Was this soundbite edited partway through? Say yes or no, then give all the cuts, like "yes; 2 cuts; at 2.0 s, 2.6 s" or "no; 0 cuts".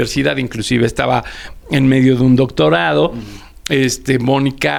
no; 0 cuts